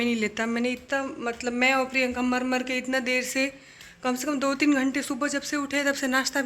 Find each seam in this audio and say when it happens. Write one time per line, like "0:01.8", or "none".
none